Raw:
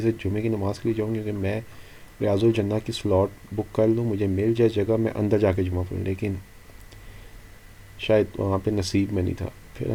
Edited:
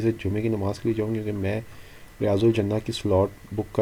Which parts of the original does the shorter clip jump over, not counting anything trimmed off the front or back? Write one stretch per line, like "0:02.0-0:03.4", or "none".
none